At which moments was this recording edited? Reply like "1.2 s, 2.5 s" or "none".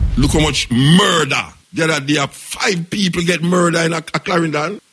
1.6 s